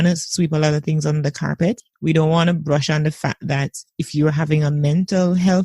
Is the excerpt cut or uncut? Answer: cut